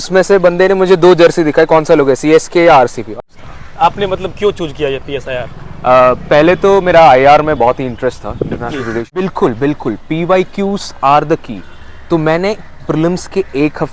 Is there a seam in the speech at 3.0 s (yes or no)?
yes